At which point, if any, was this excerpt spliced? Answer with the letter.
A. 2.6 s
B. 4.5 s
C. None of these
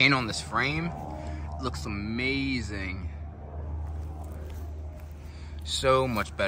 C